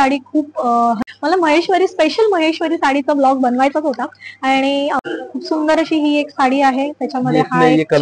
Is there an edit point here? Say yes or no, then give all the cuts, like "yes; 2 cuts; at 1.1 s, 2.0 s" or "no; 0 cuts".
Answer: yes; 2 cuts; at 1.0 s, 5.0 s